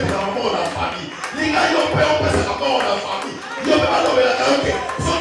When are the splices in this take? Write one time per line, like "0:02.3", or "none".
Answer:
none